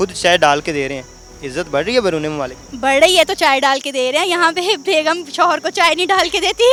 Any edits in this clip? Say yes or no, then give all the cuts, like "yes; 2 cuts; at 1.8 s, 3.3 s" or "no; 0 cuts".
no; 0 cuts